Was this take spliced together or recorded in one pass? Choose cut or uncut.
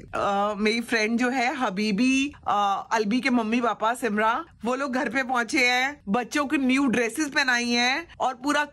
uncut